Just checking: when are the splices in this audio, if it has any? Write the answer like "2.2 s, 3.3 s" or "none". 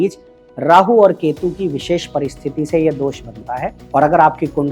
3.8 s